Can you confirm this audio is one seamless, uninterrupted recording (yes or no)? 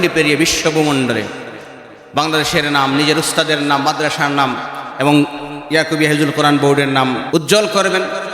no